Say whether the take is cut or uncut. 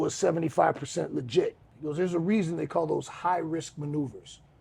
cut